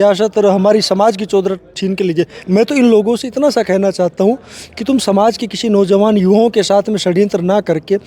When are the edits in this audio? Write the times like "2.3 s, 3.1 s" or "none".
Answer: 2.4 s